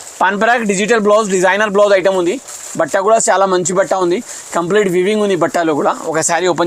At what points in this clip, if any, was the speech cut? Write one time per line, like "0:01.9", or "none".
none

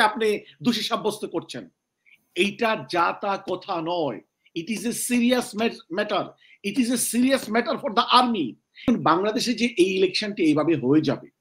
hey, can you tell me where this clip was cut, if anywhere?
0:08.9

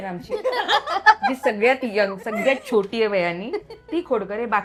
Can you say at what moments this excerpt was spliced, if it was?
none

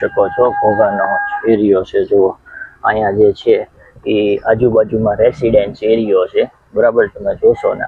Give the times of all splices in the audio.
none

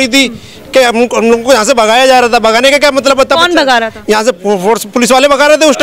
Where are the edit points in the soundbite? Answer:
none

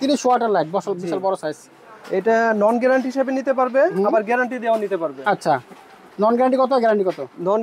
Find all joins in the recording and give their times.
none

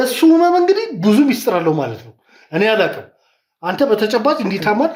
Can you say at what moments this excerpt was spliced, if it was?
none

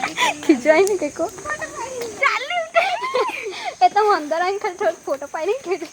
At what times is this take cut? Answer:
0:01.9

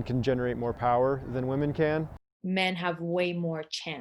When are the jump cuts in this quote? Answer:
0:02.2

